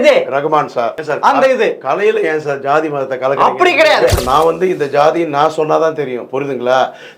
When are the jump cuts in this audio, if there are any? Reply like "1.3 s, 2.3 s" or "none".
0.9 s, 4.1 s

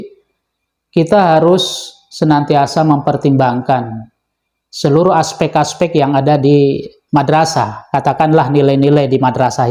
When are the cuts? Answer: none

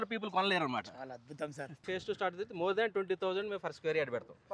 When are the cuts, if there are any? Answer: 1.8 s

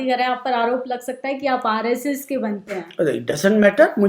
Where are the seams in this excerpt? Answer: none

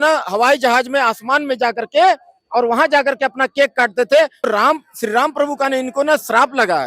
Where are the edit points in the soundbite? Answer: 4.5 s

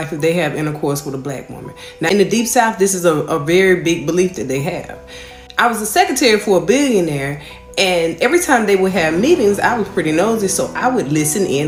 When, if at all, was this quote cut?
none

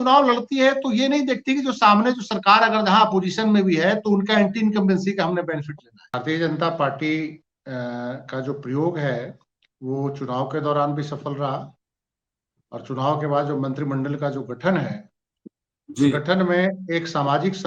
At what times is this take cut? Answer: 6.1 s

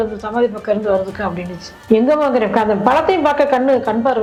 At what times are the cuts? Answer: none

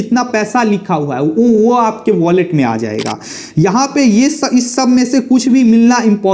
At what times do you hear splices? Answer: none

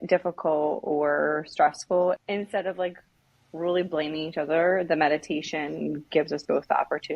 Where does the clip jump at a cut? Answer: 2.2 s

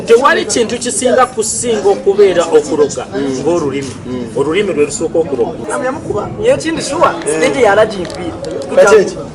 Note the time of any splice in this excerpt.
5.6 s

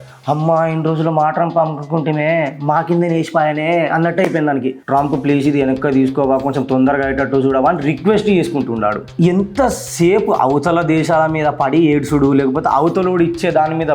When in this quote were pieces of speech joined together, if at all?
4.8 s, 9.0 s

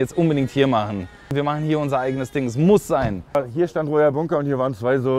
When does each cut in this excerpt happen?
1.3 s, 3.4 s

